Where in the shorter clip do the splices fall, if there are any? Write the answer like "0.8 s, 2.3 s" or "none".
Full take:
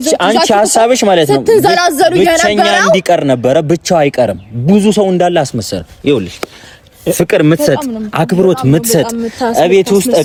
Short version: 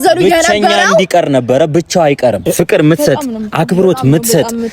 2.4 s